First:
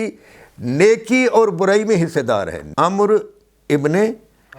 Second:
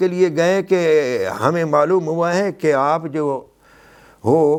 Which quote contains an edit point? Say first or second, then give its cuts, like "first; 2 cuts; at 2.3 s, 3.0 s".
first; 1 cut; at 2.6 s